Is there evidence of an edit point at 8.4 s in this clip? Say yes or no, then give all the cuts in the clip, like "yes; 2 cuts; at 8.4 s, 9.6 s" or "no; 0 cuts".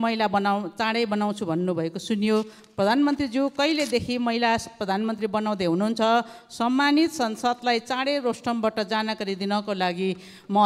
no; 0 cuts